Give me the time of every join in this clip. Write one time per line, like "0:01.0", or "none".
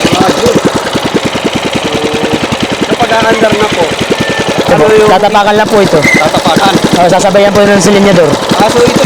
none